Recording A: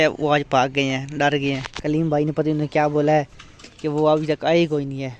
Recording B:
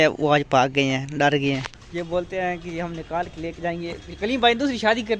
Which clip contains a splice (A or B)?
B